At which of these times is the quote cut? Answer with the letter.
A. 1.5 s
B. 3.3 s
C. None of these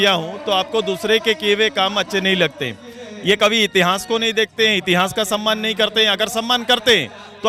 C